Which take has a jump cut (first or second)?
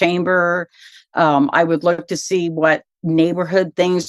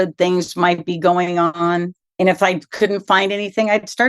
second